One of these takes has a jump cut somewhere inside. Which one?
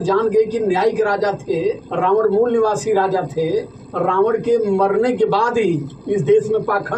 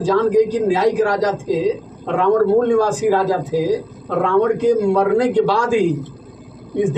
first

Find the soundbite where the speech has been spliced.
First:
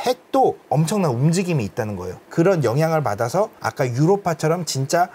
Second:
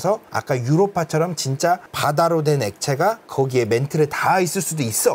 first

